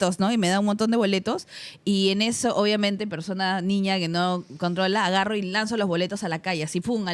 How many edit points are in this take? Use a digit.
0